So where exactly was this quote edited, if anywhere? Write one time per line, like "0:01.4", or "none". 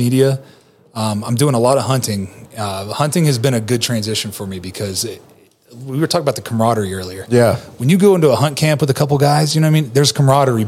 none